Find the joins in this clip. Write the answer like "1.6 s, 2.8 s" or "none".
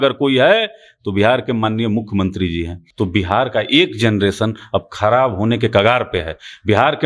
2.8 s